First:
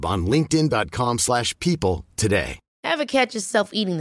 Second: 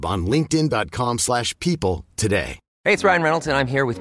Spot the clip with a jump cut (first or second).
first